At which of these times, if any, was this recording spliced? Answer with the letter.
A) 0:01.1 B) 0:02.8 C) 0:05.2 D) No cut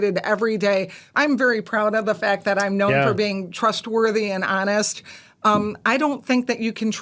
A